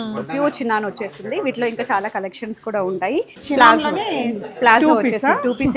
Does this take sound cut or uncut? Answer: cut